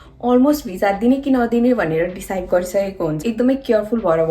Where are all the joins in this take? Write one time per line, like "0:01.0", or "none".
0:03.2